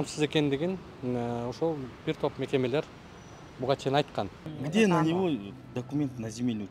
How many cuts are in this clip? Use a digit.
1